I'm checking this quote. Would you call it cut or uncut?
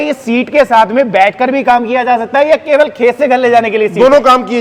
uncut